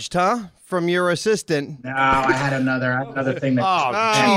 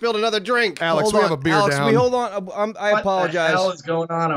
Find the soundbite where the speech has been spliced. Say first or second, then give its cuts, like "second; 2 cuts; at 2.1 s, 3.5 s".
first; 1 cut; at 1.8 s